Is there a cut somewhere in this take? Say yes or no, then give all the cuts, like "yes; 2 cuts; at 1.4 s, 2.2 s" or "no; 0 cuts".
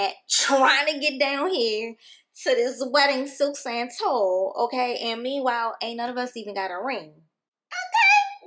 no; 0 cuts